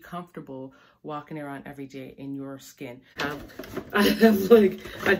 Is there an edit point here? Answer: yes; 1 cut; at 3.2 s

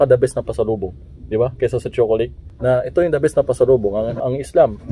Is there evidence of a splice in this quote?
yes; 2 cuts; at 2.5 s, 4.1 s

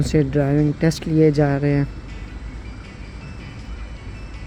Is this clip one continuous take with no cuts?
yes; 0 cuts

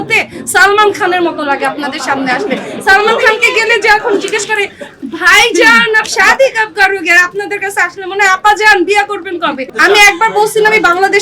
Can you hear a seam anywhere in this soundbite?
yes; 1 cut; at 9.7 s

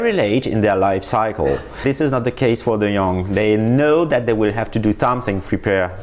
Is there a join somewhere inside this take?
no; 0 cuts

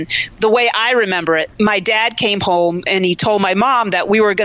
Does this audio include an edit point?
yes; 1 cut; at 1.5 s

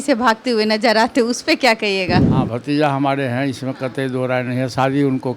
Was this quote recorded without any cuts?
no; 1 cut; at 2.3 s

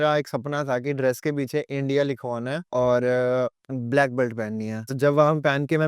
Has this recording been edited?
yes; 3 cuts; at 2.6 s, 3.7 s, 4.9 s

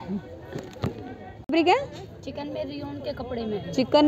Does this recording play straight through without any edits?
no; 1 cut; at 1.5 s

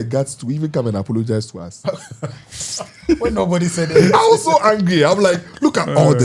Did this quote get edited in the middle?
no; 0 cuts

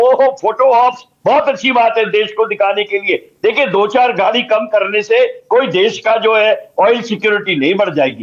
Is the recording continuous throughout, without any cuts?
yes; 0 cuts

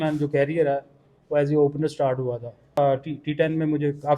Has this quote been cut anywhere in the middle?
yes; 1 cut; at 2.8 s

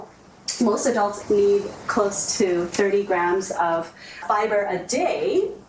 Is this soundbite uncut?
no; 1 cut; at 1.1 s

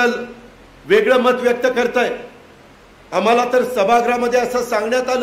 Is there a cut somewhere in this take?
no; 0 cuts

